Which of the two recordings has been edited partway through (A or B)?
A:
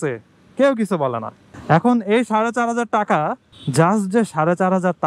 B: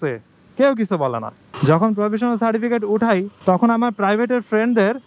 B